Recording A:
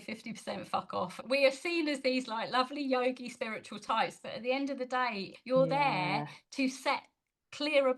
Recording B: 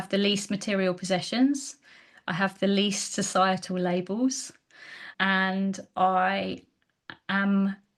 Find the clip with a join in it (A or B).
A